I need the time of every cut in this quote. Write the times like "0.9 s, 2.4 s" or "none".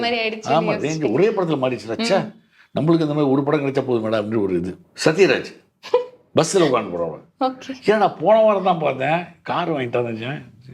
4.8 s